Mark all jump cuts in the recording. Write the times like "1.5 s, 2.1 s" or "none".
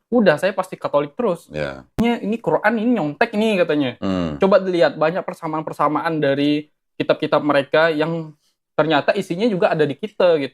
2.0 s